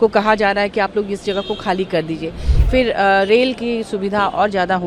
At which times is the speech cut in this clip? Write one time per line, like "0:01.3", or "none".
0:02.4